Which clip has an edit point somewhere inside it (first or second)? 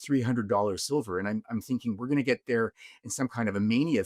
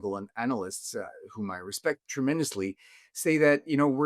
second